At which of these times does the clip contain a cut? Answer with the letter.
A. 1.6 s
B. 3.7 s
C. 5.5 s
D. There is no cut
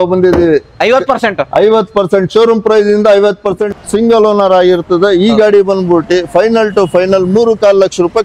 B